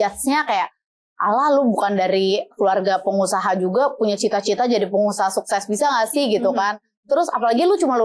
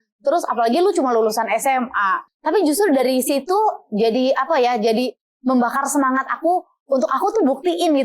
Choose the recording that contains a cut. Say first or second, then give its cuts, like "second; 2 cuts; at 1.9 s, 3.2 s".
second; 1 cut; at 2.2 s